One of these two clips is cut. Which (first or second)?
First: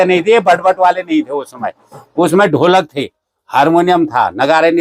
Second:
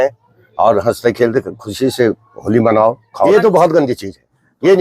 second